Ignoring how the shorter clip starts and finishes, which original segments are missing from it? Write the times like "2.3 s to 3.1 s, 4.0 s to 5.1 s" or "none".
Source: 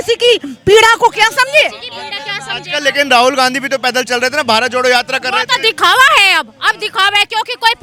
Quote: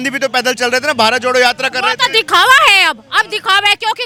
none